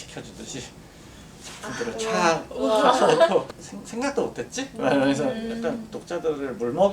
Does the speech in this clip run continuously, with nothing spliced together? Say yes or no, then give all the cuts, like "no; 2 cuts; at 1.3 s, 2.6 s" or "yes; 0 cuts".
no; 1 cut; at 3.5 s